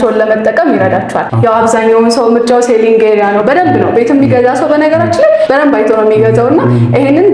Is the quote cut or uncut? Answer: uncut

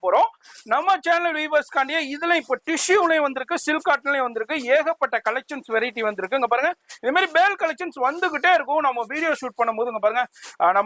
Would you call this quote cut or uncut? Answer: uncut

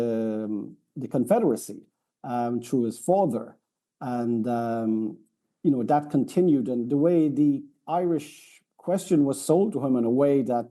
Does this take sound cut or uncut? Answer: uncut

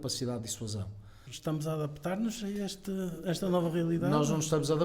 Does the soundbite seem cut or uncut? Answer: cut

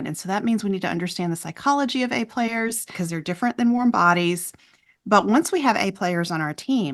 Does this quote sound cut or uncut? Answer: cut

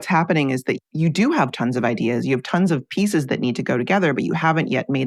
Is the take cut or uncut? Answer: uncut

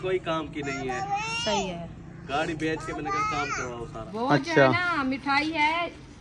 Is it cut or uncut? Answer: cut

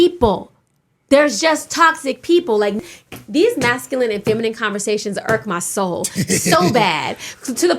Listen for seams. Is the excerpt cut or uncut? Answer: cut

